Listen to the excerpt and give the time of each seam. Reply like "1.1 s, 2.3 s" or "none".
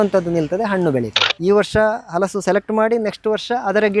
1.2 s